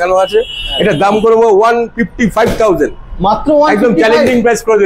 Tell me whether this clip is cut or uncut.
uncut